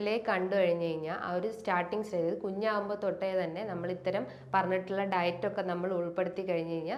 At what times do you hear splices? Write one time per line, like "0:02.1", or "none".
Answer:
none

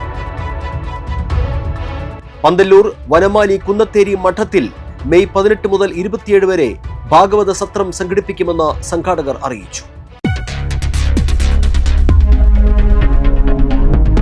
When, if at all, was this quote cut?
0:02.3

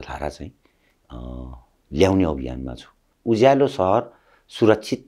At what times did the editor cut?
0:03.1

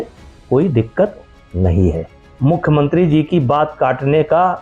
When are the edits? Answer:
0:02.1

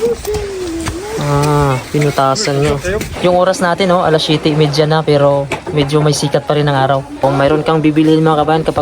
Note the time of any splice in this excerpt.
0:03.1
0:07.2

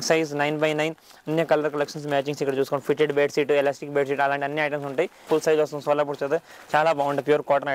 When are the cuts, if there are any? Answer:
0:05.2

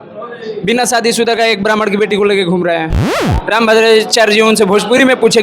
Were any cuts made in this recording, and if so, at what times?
0:03.2

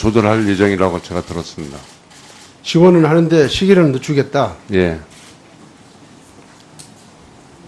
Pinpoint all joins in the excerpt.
none

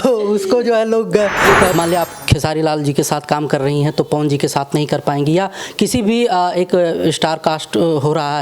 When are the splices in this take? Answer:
0:01.7

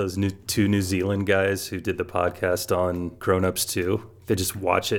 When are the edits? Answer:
0:03.1

